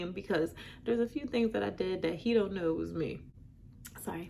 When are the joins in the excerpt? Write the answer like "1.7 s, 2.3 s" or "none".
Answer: 3.3 s